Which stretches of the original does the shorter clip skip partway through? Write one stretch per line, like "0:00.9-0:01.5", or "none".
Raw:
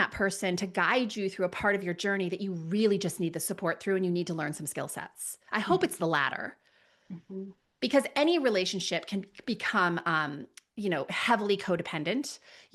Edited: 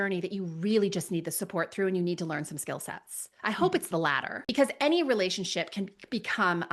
0:06.5-0:07.7